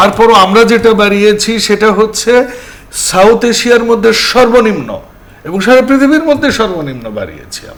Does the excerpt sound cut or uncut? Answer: uncut